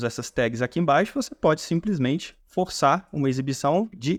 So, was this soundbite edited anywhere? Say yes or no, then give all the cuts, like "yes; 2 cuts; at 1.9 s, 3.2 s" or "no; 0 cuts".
no; 0 cuts